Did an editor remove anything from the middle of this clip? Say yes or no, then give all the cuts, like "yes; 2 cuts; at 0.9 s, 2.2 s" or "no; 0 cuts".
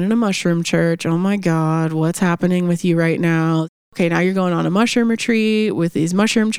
yes; 1 cut; at 3.9 s